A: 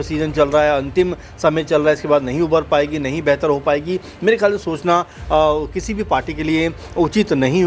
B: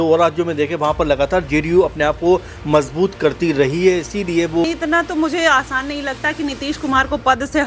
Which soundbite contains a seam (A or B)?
B